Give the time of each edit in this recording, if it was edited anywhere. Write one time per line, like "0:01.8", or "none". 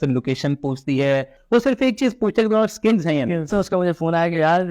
0:01.4
0:03.5